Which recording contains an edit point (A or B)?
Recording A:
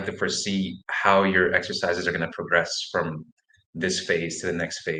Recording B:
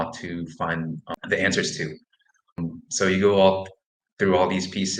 B